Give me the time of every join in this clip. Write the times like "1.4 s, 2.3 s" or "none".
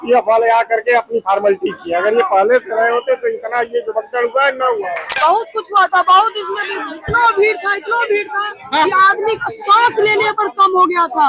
5.1 s